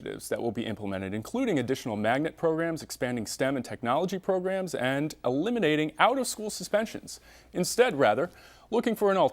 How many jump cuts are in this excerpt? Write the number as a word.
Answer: one